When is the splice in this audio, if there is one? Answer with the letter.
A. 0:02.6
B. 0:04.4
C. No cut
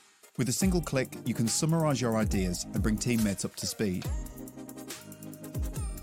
C